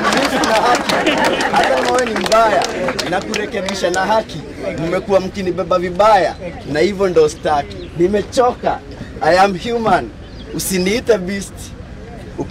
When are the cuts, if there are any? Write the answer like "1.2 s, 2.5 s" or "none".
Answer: 1.8 s